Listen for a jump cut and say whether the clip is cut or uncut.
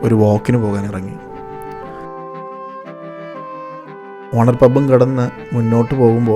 cut